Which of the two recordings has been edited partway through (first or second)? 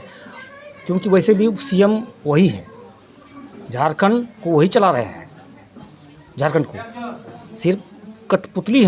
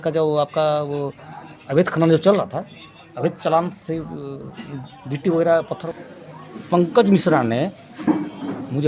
second